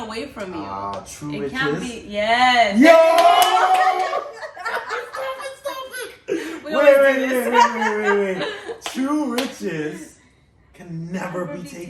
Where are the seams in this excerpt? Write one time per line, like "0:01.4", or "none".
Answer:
none